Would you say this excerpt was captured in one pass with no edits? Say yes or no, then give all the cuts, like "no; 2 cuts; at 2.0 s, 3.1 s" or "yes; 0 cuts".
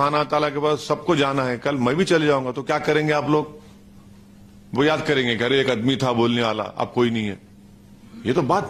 yes; 0 cuts